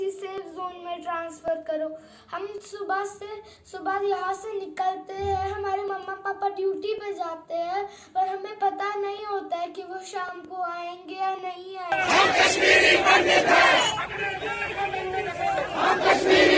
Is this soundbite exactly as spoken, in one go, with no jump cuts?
no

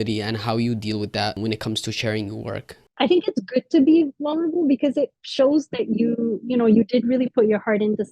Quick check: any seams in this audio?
yes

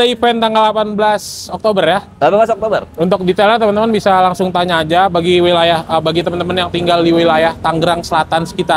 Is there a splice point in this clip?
no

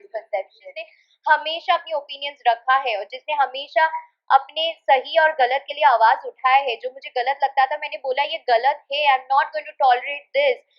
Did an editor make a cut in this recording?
yes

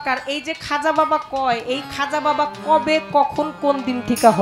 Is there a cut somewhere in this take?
no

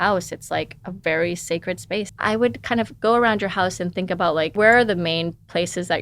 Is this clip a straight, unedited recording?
no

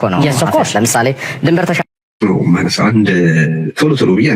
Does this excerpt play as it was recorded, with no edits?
no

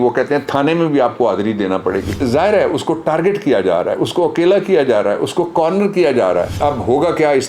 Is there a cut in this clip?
yes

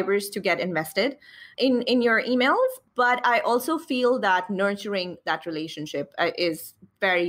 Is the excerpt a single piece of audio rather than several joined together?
no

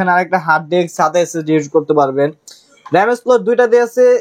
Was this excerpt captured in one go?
yes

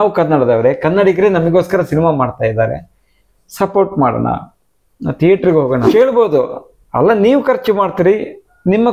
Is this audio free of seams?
no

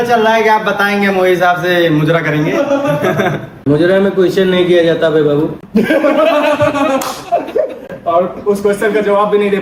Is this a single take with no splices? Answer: yes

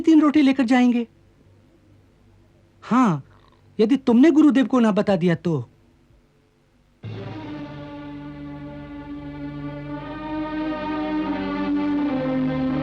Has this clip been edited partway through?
no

